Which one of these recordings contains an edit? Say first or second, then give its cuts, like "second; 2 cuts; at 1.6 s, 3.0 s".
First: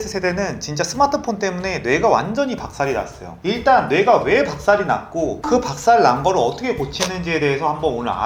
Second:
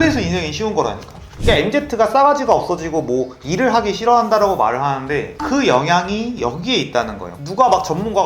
second; 2 cuts; at 1.2 s, 7.3 s